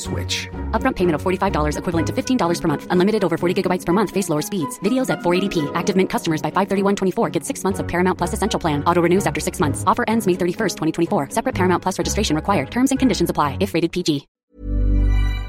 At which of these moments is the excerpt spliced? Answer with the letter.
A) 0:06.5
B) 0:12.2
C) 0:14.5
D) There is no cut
C